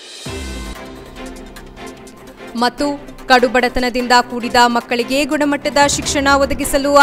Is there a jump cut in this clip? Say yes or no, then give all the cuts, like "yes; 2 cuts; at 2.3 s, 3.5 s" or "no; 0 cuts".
no; 0 cuts